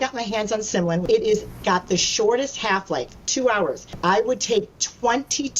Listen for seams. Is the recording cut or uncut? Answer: cut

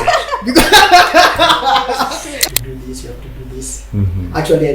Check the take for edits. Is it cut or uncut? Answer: cut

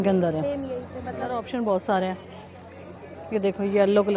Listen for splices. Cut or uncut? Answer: cut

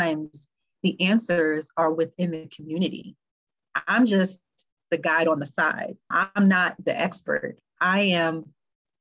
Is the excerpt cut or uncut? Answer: uncut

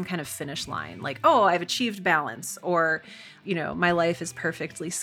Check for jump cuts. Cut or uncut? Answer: cut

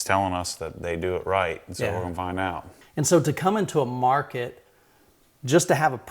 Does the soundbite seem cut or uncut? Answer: cut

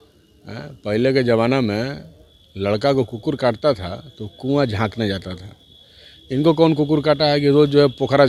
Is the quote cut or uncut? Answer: uncut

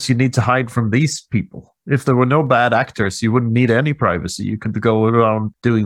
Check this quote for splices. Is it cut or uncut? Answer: uncut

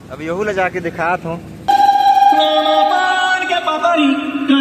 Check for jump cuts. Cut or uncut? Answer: cut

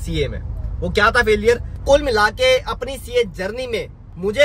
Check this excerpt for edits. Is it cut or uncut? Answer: cut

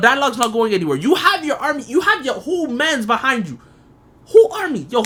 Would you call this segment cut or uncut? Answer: uncut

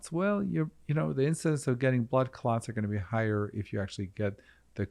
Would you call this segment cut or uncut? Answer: uncut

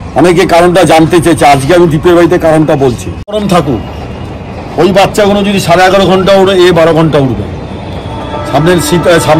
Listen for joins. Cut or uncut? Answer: cut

